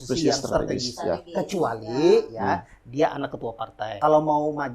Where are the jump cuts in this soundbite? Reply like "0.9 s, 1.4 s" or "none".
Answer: 3.8 s